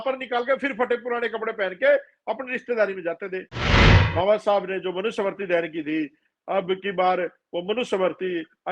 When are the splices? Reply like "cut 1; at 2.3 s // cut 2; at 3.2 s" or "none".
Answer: cut 1; at 3.8 s